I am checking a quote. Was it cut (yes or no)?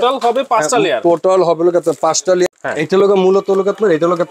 yes